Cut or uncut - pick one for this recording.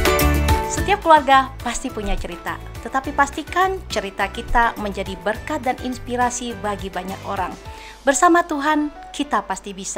uncut